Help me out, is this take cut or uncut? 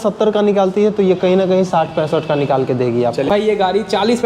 cut